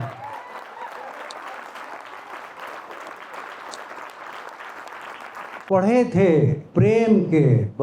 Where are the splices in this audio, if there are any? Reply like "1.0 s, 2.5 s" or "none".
5.7 s, 6.6 s